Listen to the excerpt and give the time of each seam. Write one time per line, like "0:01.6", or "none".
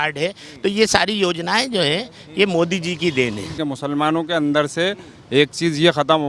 0:03.6